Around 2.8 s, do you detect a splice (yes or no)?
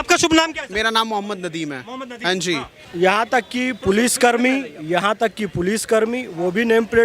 yes